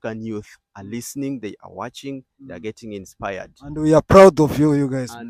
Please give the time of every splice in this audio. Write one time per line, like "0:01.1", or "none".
none